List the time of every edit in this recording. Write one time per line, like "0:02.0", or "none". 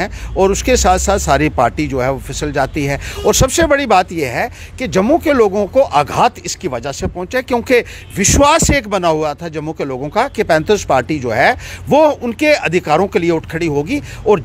none

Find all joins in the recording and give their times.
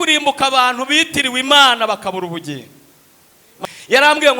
0:03.5

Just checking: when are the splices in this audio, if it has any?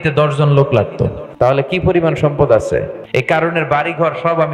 0:01.4
0:03.1

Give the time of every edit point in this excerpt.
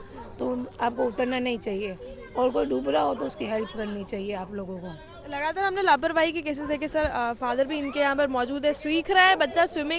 none

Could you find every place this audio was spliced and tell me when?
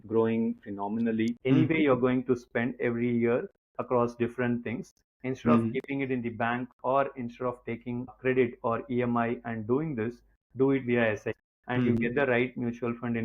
0:01.4
0:08.1
0:11.4

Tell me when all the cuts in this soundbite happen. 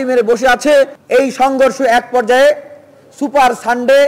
0:01.0

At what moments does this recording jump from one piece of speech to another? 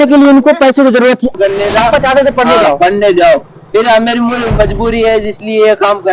0:01.3

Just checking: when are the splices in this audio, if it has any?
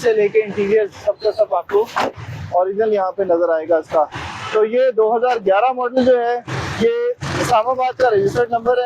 none

